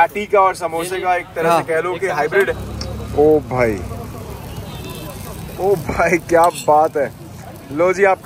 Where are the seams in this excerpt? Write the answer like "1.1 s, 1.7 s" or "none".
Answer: 2.6 s